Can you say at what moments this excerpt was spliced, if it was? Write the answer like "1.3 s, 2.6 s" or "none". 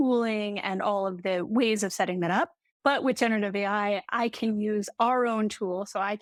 none